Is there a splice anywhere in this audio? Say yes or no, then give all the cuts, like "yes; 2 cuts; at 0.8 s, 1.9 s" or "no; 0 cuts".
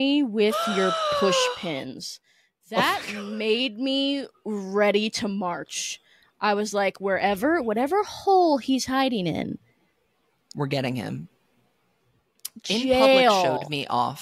no; 0 cuts